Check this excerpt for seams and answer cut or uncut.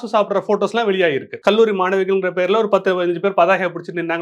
cut